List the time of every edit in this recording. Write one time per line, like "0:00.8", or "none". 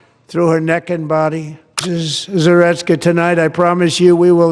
0:01.8

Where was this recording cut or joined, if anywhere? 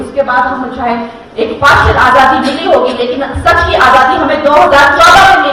none

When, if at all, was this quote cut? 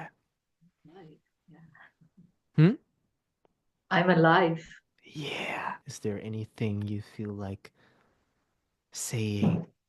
0:05.9

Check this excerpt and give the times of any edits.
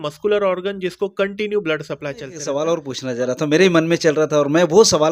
0:02.3

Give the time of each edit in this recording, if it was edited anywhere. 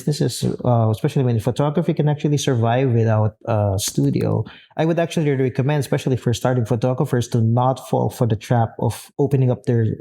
none

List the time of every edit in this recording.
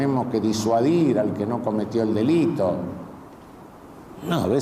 0:03.6

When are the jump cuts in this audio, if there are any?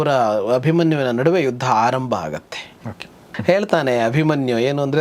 0:03.3

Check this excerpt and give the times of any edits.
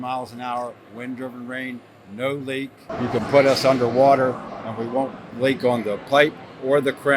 0:02.8

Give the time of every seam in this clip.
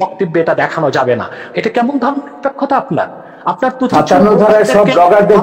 0:01.5

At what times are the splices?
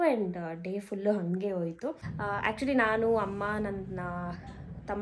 0:02.1

